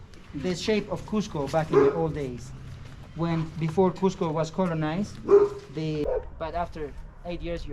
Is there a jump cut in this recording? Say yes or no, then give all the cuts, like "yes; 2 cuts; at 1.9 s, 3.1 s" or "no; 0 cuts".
yes; 1 cut; at 6.0 s